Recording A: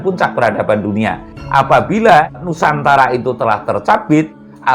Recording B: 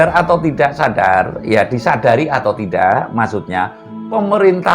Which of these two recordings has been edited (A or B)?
A